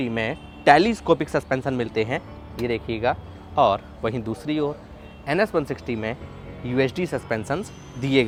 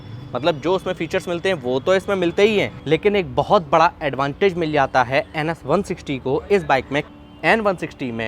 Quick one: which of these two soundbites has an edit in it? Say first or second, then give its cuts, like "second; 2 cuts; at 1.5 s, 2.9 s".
second; 2 cuts; at 2.8 s, 7.1 s